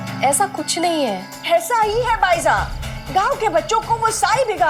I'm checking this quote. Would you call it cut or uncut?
uncut